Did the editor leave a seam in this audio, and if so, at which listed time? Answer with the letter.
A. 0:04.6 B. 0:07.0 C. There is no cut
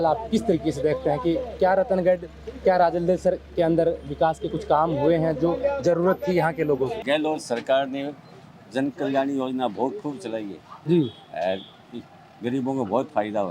B